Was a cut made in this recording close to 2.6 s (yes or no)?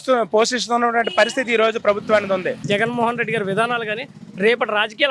yes